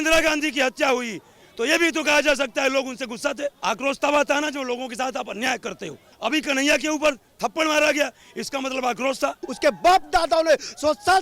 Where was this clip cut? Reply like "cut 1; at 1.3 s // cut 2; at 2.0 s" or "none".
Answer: cut 1; at 3.6 s // cut 2; at 6.2 s // cut 3; at 9.4 s